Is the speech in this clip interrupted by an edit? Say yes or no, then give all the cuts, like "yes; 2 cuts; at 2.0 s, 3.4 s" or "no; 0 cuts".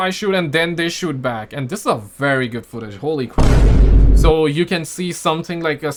no; 0 cuts